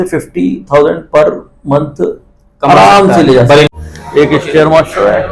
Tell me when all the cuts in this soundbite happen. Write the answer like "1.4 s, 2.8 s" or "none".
3.7 s